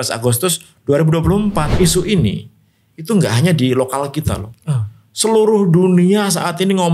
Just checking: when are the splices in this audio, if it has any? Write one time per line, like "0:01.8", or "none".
0:01.7

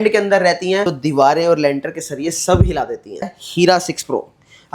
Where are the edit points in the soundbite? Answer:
0:00.9
0:03.4

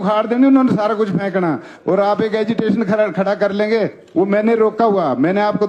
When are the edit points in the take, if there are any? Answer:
none

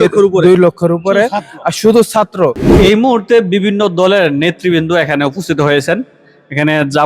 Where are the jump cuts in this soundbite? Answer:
0:02.6

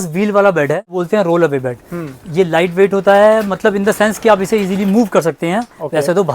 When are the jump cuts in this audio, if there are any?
0:01.0

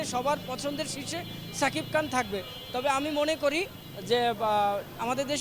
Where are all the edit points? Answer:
none

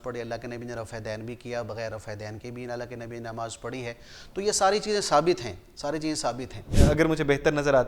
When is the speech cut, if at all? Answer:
0:06.8

